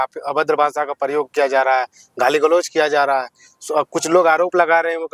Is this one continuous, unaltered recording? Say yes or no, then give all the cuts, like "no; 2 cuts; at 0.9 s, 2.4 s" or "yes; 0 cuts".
yes; 0 cuts